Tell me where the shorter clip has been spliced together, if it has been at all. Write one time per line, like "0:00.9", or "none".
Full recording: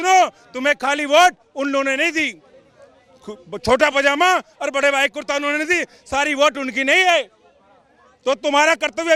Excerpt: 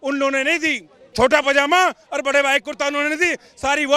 0:01.0